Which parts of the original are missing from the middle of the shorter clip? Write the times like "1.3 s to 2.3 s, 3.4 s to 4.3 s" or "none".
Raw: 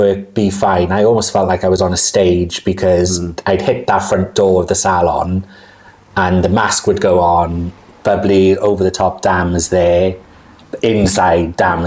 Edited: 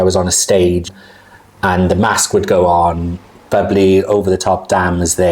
2.6 s to 5.4 s